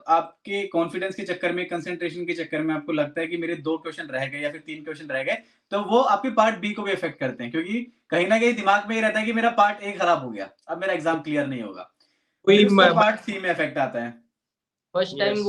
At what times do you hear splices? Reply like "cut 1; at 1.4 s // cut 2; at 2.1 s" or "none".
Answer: none